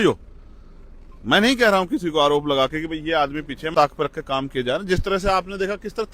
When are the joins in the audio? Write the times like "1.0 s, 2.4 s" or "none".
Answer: 3.7 s